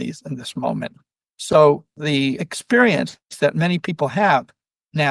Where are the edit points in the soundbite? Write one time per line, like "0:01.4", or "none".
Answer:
0:02.2
0:03.2